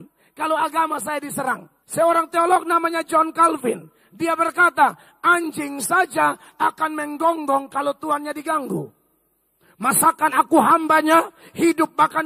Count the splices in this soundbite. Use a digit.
1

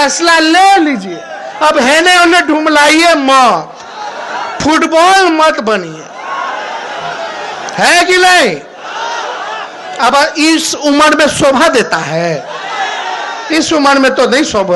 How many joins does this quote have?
0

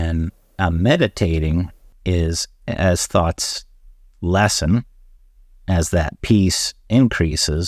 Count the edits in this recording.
1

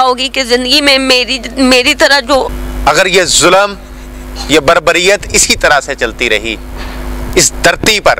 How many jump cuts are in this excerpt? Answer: 1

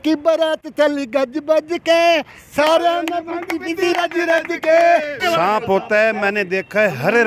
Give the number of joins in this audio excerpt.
1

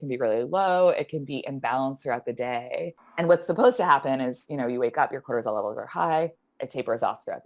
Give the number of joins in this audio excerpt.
1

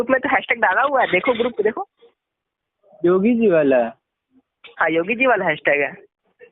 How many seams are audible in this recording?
0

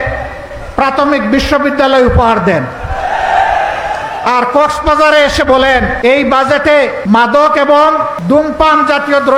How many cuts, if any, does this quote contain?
3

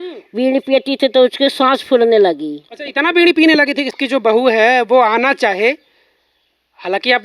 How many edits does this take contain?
1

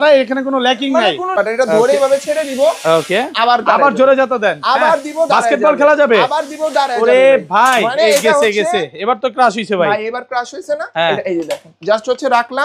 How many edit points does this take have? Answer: 1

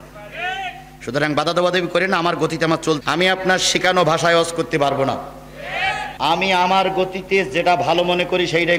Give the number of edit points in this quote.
2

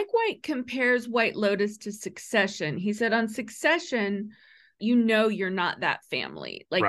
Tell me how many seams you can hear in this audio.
1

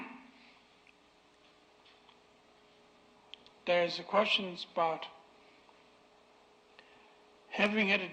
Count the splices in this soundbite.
0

